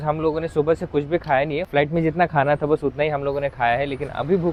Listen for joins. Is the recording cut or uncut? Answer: uncut